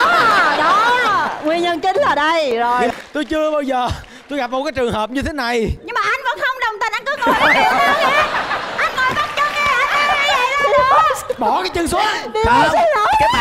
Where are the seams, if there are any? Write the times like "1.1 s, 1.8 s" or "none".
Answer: 2.9 s